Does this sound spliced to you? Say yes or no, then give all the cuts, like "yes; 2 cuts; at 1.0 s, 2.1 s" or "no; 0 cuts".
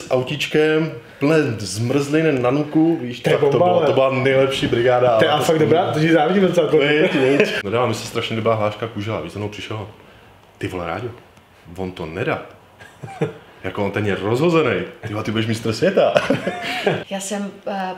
yes; 2 cuts; at 7.6 s, 17.0 s